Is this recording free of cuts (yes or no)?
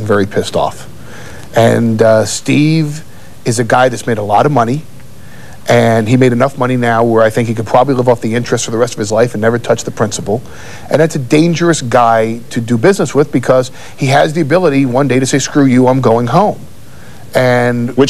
no